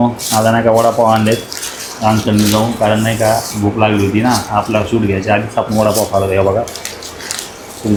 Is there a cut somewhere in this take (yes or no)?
no